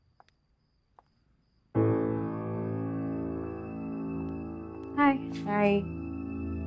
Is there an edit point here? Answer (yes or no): yes